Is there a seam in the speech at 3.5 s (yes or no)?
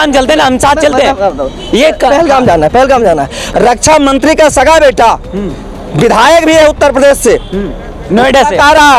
yes